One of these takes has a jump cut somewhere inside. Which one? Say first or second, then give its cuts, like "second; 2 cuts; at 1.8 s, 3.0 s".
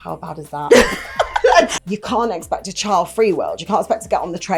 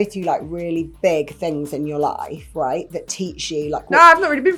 first; 1 cut; at 1.7 s